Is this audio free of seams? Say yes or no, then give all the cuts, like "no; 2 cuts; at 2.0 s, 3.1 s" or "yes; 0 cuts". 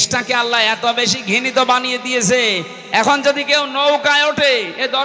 yes; 0 cuts